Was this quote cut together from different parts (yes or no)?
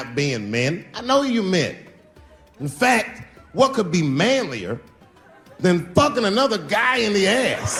no